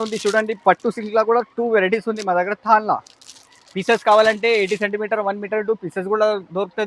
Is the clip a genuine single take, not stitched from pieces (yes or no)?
yes